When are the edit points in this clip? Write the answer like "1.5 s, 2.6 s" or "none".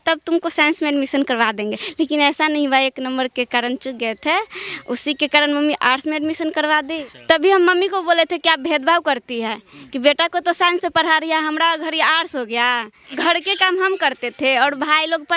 1.8 s, 7.1 s, 13.1 s